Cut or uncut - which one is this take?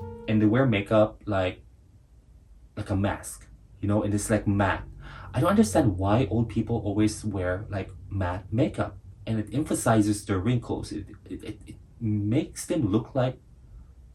uncut